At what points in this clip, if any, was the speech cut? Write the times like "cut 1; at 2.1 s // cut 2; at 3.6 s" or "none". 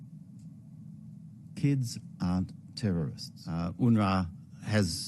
cut 1; at 3.7 s